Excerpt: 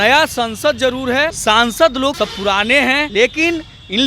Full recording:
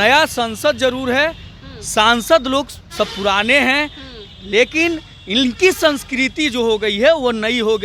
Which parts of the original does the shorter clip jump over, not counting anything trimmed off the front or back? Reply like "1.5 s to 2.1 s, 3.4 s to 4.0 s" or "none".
1.4 s to 1.9 s, 3.0 s to 3.8 s